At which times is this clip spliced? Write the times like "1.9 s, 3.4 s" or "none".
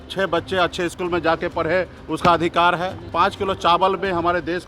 3.0 s